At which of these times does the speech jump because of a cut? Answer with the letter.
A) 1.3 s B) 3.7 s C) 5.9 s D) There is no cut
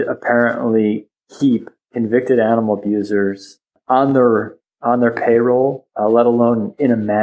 B